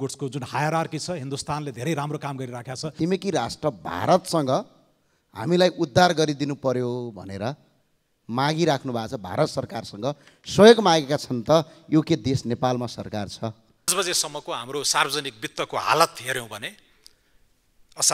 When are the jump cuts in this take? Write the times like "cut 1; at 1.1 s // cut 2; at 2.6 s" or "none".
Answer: cut 1; at 2.9 s // cut 2; at 13.9 s